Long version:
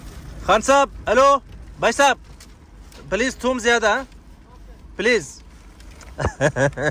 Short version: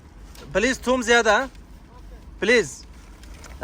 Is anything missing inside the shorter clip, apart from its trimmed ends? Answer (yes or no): no